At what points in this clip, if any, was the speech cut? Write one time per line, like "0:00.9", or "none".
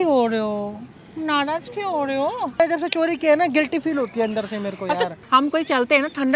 0:02.6
0:05.2